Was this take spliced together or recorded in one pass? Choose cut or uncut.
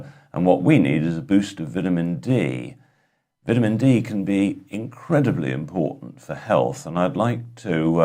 cut